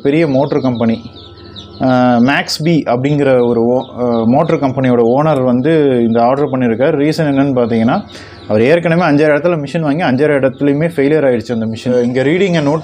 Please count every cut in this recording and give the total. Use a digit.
1